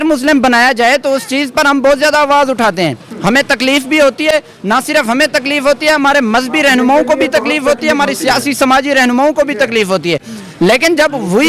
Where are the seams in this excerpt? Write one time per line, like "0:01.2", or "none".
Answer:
none